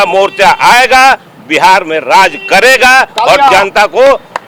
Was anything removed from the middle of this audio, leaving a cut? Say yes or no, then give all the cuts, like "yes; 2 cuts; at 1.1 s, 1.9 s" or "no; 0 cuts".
no; 0 cuts